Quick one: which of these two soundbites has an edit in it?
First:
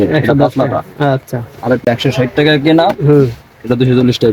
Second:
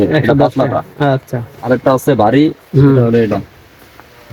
first; 1 cut; at 1.9 s

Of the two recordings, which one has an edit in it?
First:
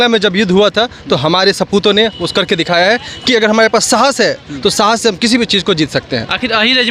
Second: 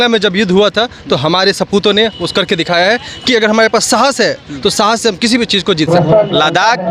second; 1 cut; at 5.9 s

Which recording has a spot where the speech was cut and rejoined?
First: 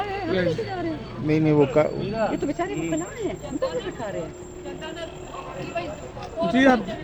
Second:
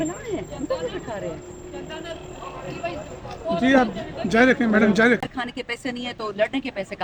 second; 1 cut; at 5.3 s

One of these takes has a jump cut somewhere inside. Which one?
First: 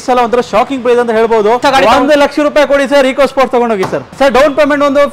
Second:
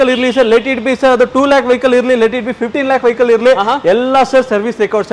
first; 2 cuts; at 1.6 s, 4.1 s

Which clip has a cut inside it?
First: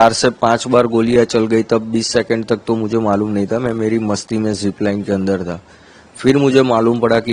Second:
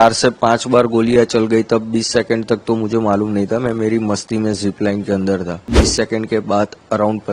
second; 1 cut; at 5.7 s

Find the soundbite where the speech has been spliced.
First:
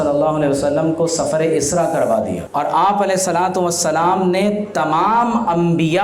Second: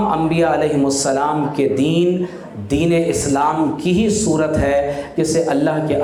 first; 1 cut; at 2.4 s

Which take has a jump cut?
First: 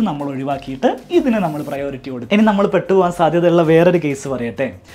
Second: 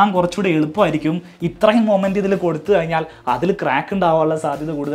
first; 1 cut; at 2.3 s

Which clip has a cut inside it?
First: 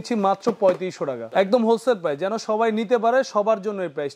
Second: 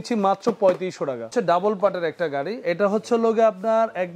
second; 1 cut; at 1.3 s

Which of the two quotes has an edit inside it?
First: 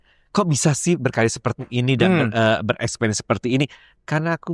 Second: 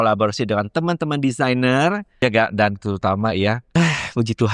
second; 2 cuts; at 2.1 s, 3.6 s

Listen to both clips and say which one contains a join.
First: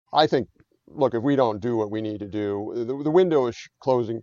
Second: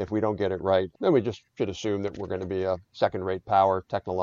second; 1 cut; at 0.9 s

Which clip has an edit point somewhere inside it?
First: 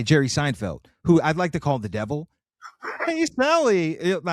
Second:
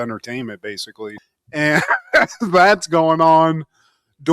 second; 1 cut; at 1.1 s

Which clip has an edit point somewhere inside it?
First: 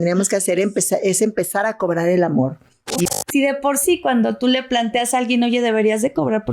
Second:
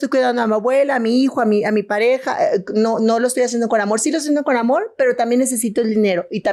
first; 1 cut; at 3.1 s

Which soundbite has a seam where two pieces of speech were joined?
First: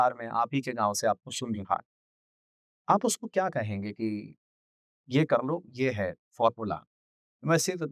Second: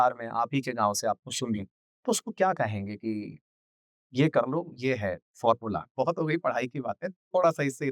second; 2 cuts; at 2.1 s, 5.9 s

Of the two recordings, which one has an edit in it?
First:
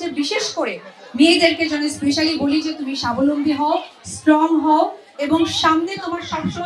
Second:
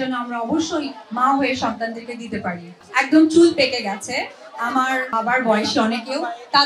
second; 2 cuts; at 2.8 s, 5.1 s

